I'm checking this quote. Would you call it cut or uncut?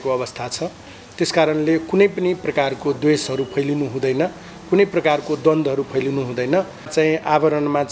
cut